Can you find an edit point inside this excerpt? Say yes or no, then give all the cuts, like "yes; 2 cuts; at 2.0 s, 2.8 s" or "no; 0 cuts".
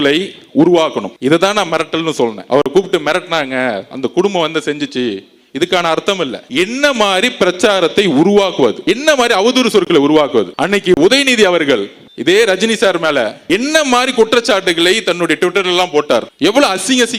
no; 0 cuts